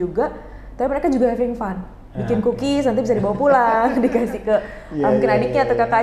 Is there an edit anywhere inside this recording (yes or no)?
no